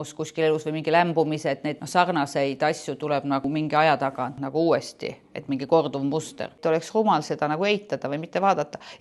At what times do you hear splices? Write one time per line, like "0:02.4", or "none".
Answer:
0:01.8
0:03.5
0:04.4
0:06.5